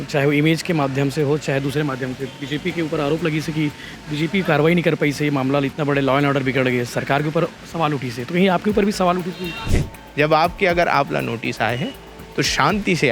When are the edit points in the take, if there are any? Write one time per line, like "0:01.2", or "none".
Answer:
0:09.7